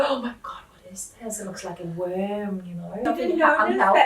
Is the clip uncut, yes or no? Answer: no